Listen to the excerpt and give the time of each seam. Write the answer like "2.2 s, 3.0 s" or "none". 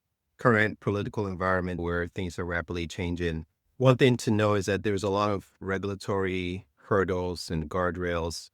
1.8 s